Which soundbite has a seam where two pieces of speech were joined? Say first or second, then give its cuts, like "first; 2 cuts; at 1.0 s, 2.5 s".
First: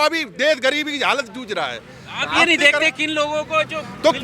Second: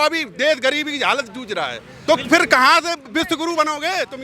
second; 1 cut; at 1.9 s